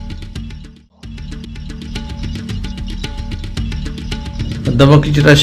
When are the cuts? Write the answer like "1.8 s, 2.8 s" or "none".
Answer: 1.4 s